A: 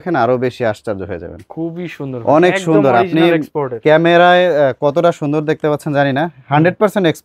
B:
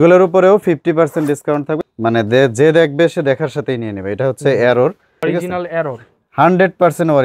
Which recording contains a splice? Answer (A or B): B